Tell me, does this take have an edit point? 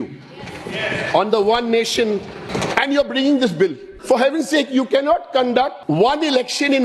yes; 3 cuts; at 2.5 s, 3.9 s, 5.8 s

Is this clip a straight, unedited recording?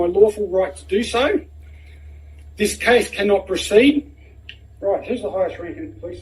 yes; 0 cuts

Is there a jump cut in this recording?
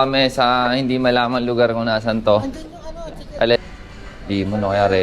yes; 1 cut; at 3.6 s

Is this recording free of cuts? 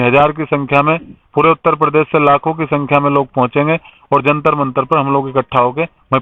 yes; 0 cuts

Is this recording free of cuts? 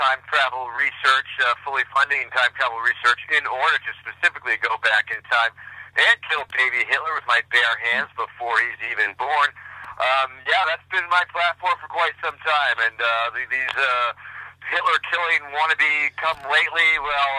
no; 1 cut; at 14.5 s

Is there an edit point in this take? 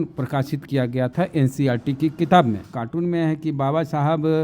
yes; 1 cut; at 2.8 s

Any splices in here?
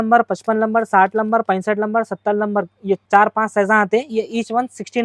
no; 0 cuts

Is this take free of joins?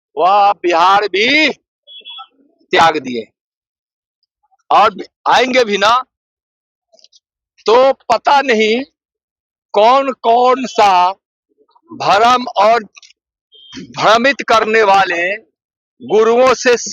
yes; 0 cuts

